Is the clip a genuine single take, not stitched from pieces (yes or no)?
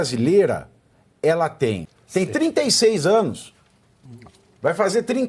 no